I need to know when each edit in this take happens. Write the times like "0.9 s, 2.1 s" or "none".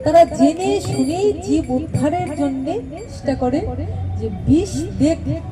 3.2 s